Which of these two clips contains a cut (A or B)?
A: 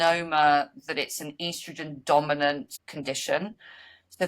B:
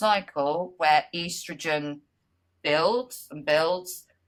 A